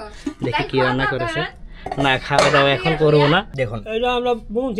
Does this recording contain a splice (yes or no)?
yes